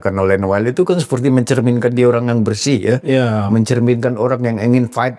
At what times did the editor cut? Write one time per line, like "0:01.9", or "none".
none